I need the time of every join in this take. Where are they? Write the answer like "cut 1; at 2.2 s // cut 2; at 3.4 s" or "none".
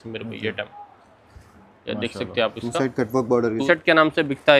cut 1; at 3.6 s